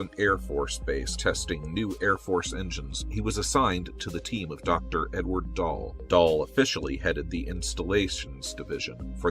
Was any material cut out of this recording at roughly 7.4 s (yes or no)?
no